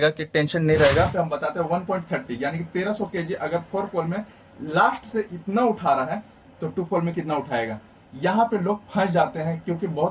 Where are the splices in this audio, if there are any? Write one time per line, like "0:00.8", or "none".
0:01.1